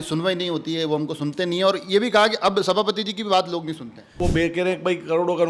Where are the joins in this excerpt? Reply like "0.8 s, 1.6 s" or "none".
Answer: 4.2 s